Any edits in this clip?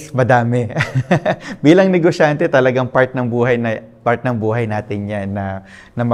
no; 0 cuts

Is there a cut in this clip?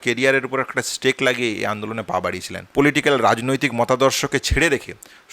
yes; 1 cut; at 2.5 s

